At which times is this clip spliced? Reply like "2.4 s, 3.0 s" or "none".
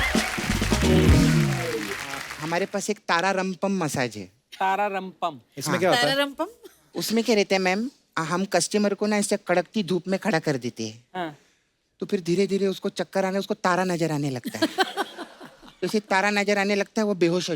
2.3 s